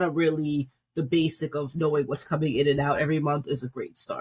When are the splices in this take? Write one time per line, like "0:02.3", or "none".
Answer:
none

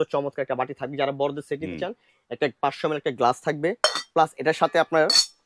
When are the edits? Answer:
none

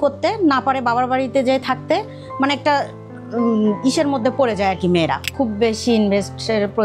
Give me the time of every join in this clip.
0:05.2

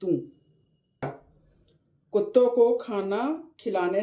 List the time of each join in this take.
0:01.0

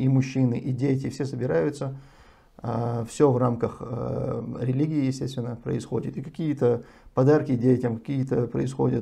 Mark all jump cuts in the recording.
none

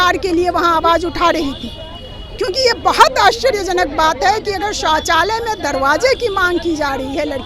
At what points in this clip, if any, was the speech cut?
none

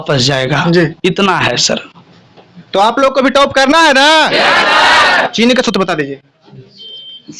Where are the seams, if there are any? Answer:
0:05.3

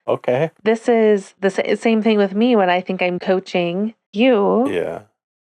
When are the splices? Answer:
0:04.0

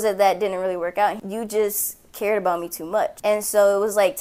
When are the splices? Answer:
0:01.2
0:03.2

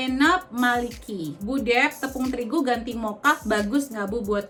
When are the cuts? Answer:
none

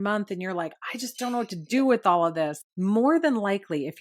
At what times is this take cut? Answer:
0:02.7

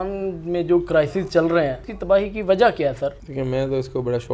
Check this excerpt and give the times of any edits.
0:01.9
0:03.2

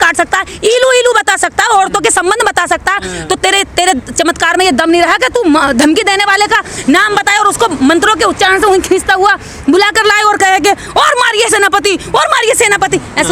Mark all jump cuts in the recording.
none

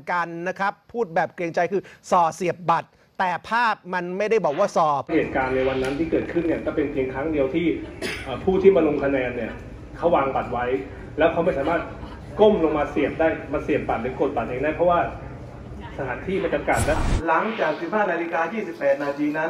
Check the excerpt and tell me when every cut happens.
0:05.1
0:17.0

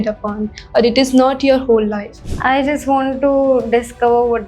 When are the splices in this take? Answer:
0:02.3

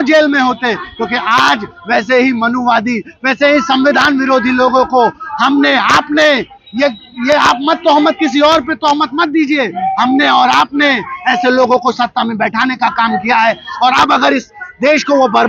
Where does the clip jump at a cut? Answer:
none

